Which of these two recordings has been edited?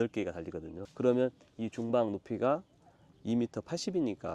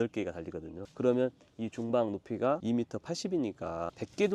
second; 1 cut; at 2.6 s

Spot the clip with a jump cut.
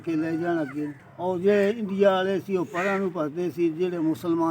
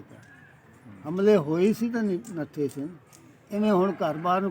first; 1 cut; at 1.0 s

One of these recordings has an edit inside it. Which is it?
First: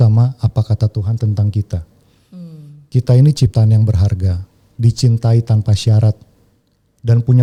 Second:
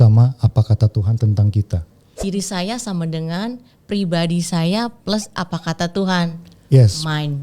second; 1 cut; at 2.2 s

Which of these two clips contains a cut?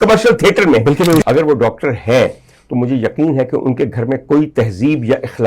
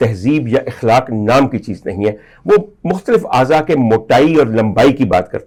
first; 1 cut; at 1.2 s

